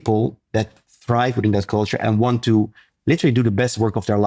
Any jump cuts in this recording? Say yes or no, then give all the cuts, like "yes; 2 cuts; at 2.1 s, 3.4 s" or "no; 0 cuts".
no; 0 cuts